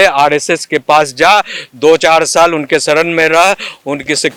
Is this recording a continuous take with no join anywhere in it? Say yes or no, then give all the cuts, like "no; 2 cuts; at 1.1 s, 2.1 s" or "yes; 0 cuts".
yes; 0 cuts